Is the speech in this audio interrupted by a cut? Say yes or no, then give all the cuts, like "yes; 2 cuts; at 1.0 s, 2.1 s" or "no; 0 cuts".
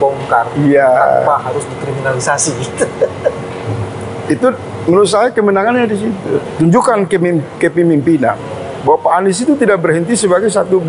yes; 1 cut; at 6.5 s